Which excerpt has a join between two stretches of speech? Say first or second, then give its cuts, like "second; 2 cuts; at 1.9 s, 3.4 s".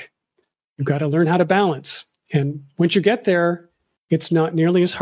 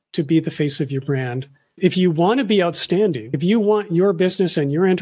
second; 2 cuts; at 1.8 s, 3.3 s